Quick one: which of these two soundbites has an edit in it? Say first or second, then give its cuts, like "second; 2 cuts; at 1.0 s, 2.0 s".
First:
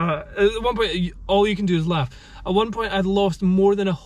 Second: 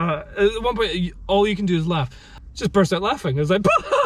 second; 1 cut; at 2.3 s